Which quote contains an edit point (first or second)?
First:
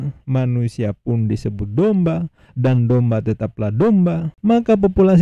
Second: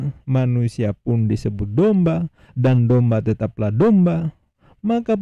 first